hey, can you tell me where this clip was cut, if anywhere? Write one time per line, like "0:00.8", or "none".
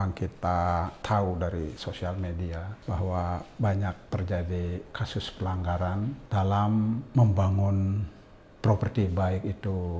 0:01.0
0:02.7
0:04.0
0:06.2